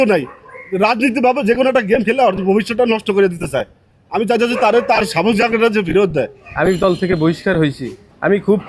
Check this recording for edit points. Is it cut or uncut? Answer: cut